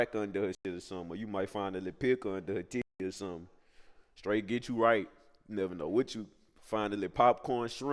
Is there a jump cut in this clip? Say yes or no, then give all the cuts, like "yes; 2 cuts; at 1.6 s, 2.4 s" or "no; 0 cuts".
no; 0 cuts